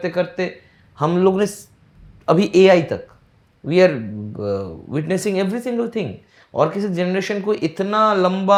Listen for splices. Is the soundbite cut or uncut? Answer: uncut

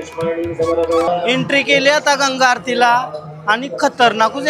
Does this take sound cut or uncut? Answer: cut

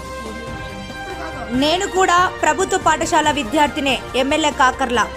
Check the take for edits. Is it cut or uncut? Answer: cut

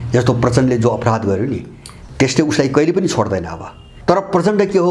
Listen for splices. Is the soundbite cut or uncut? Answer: cut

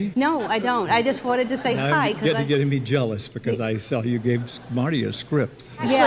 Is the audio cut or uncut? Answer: uncut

